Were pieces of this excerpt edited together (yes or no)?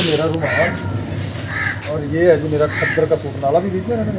no